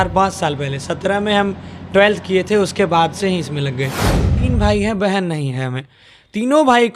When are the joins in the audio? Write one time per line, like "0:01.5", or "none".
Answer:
0:04.4